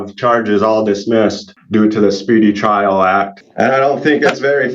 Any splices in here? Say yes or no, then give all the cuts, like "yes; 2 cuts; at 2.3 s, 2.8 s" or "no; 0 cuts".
yes; 2 cuts; at 1.5 s, 3.4 s